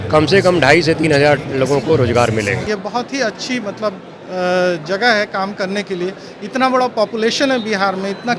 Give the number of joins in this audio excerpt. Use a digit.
1